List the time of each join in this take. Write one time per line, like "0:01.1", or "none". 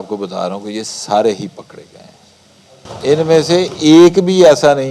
0:02.8